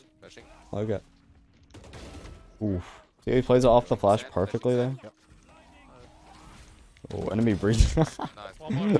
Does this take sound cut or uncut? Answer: uncut